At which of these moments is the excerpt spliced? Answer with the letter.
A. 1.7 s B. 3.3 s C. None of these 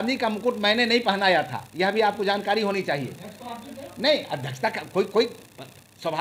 C